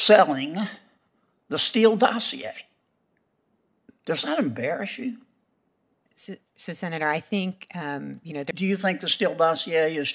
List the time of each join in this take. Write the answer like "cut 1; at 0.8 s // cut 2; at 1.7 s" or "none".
cut 1; at 8.5 s